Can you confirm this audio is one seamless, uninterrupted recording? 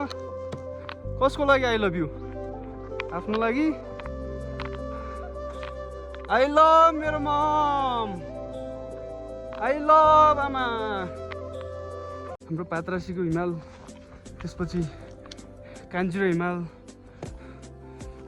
no; 1 cut; at 12.4 s

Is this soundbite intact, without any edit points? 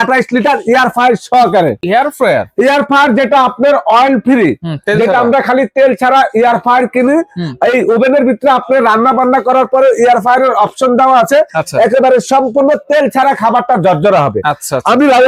yes; 0 cuts

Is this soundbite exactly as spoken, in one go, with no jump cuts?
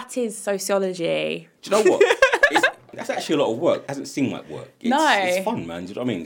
no; 3 cuts; at 1.5 s, 2.9 s, 3.9 s

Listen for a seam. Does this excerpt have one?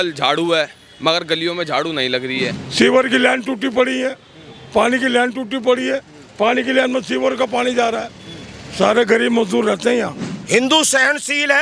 yes; 2 cuts; at 2.6 s, 10.3 s

